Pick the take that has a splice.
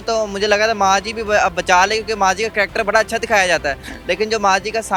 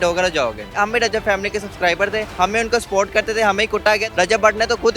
second; 3 cuts; at 0.7 s, 2.3 s, 4.1 s

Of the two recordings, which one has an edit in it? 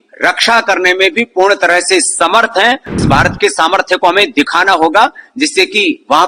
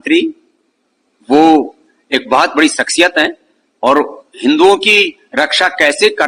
first; 1 cut; at 3.0 s

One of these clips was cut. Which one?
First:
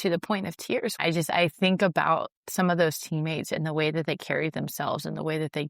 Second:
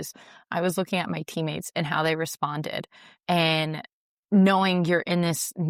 first; 1 cut; at 1.0 s

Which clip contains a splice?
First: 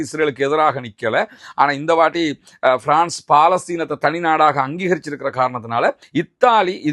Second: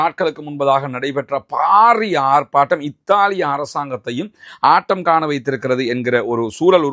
first; 1 cut; at 6.0 s

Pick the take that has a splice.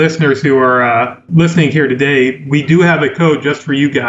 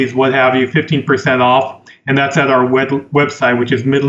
first; 1 cut; at 1.2 s

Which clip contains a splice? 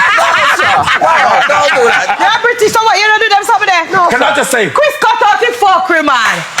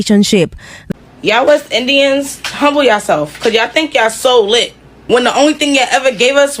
second; 2 cuts; at 1.1 s, 4.9 s

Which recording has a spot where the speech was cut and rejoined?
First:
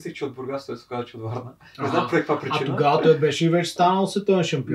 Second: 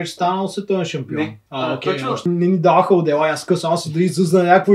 second; 1 cut; at 2.2 s

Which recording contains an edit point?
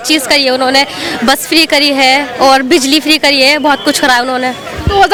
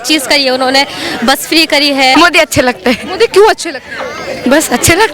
second; 1 cut; at 2.1 s

